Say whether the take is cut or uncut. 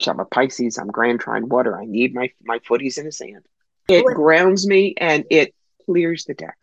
cut